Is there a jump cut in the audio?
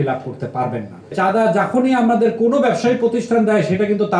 yes; 1 cut; at 1.1 s

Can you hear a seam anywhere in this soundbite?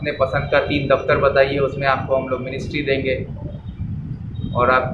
no; 0 cuts

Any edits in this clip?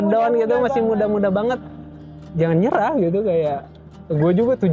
no; 0 cuts

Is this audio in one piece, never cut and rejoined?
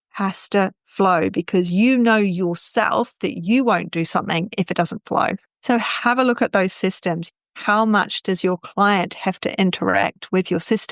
no; 1 cut; at 5.4 s

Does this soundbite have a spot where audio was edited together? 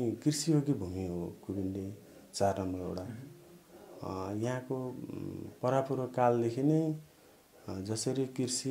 no; 0 cuts

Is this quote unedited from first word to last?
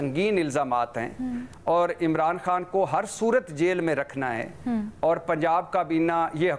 yes; 0 cuts

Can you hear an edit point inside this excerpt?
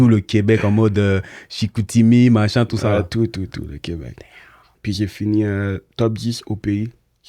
yes; 1 cut; at 4.7 s

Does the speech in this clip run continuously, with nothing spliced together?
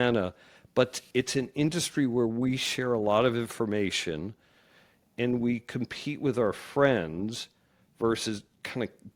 yes; 0 cuts

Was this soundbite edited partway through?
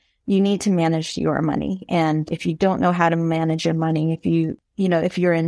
yes; 2 cuts; at 2.3 s, 4.5 s

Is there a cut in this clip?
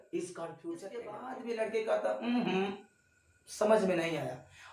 yes; 1 cut; at 1.2 s

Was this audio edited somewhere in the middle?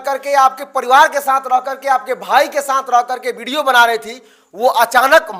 no; 0 cuts

